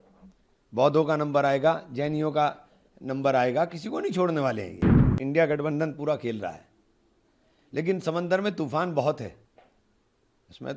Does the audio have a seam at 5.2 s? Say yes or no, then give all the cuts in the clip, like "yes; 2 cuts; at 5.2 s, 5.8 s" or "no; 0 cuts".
yes; 1 cut; at 5.2 s